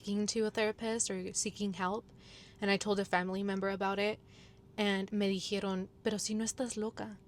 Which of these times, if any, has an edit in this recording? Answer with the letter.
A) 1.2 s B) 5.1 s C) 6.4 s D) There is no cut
B